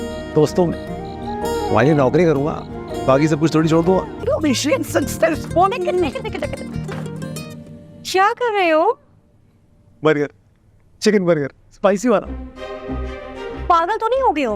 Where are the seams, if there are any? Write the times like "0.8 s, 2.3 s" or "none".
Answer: 4.2 s